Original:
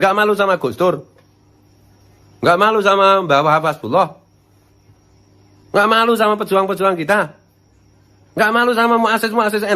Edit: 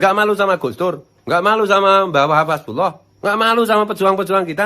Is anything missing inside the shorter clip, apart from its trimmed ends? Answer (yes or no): yes